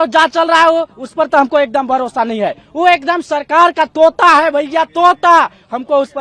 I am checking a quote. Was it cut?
no; 0 cuts

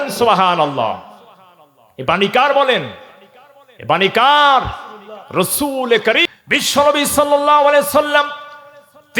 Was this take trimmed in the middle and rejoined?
yes; 1 cut; at 6.2 s

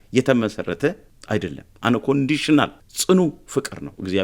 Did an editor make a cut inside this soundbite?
yes; 2 cuts; at 1.1 s, 2.9 s

